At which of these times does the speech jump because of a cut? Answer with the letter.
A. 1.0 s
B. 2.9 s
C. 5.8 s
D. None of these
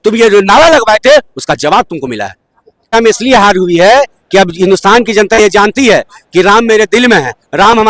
B